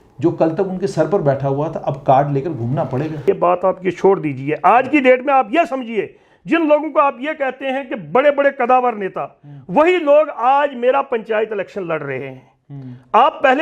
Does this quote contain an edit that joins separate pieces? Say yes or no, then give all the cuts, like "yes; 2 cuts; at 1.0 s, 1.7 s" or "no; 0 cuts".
yes; 1 cut; at 3.2 s